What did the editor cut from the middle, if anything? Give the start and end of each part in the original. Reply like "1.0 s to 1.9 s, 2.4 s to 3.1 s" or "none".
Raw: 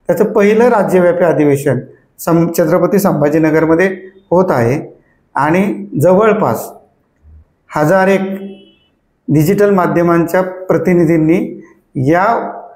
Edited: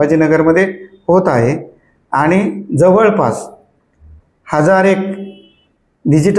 none